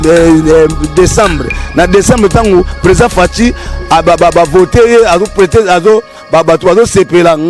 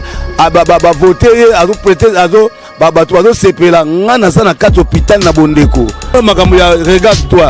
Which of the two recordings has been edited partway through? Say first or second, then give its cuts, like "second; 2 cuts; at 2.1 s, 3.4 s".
second; 1 cut; at 6.1 s